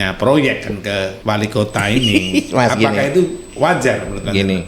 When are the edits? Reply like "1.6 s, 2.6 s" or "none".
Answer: 1.1 s